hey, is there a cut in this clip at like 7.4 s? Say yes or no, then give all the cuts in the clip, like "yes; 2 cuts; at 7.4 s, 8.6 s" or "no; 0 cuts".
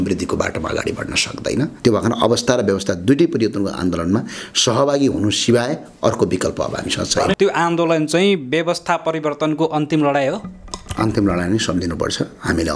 yes; 2 cuts; at 1.8 s, 7.4 s